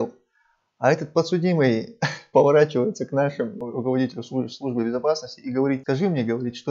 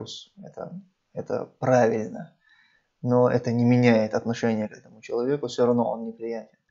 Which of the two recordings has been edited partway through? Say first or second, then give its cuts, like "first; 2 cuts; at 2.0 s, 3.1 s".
first; 2 cuts; at 3.7 s, 5.8 s